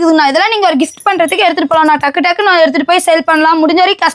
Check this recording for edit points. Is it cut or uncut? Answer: uncut